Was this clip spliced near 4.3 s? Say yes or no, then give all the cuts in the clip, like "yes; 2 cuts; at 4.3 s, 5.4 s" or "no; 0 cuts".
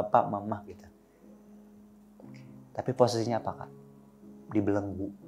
no; 2 cuts; at 0.7 s, 2.4 s